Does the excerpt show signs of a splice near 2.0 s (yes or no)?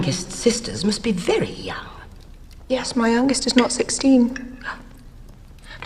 no